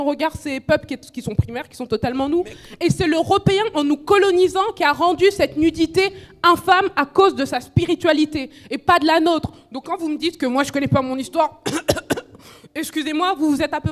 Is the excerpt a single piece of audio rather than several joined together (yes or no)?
yes